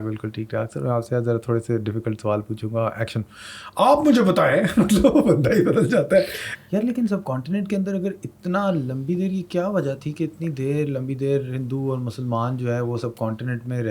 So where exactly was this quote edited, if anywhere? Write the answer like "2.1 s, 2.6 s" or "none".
6.5 s